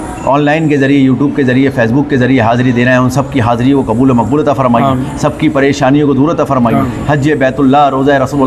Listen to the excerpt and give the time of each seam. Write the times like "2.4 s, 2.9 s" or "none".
none